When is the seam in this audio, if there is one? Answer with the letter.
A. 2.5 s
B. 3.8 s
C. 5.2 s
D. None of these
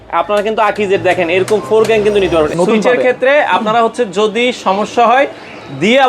A